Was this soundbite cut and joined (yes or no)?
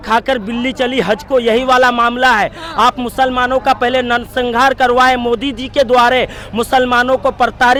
no